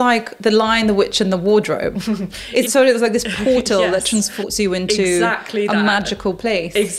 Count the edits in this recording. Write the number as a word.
two